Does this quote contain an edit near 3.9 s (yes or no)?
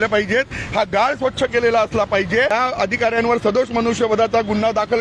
no